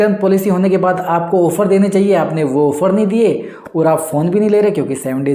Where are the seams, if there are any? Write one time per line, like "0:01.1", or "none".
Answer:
none